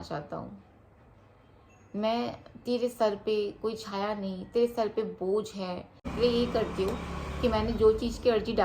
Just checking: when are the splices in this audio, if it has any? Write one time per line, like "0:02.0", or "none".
0:06.1